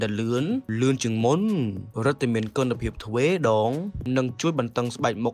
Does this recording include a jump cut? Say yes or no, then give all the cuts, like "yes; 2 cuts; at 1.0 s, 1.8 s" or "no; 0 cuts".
no; 0 cuts